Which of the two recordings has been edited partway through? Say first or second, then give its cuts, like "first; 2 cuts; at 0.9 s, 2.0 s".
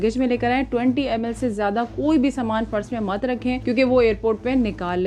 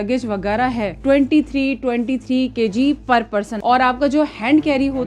second; 2 cuts; at 1.0 s, 3.5 s